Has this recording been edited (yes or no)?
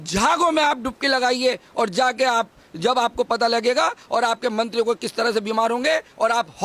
no